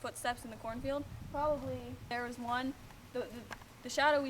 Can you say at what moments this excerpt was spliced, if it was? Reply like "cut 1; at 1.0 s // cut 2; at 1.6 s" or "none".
cut 1; at 2.1 s